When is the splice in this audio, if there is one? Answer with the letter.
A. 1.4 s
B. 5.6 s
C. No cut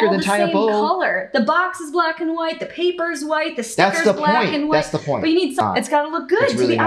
B